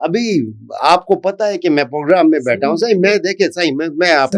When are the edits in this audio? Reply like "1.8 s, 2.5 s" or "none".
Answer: none